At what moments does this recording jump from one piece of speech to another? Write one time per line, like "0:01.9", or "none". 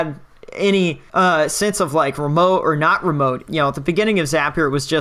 0:01.0
0:03.4